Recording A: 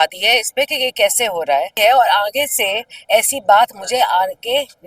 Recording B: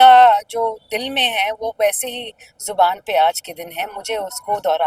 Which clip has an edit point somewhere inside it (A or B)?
A